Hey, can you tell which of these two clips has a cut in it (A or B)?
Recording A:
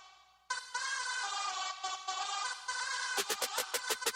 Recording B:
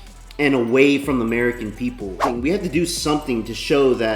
B